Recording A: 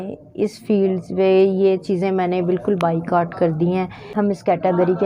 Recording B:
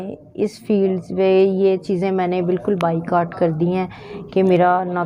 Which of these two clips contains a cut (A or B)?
A